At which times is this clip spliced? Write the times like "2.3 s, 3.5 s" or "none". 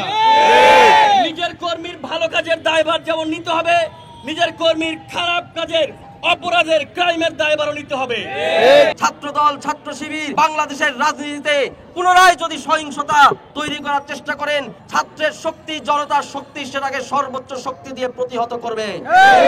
9.0 s, 10.2 s, 14.8 s